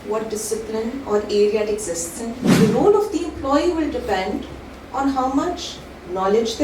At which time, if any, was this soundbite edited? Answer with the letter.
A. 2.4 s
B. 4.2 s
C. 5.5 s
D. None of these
A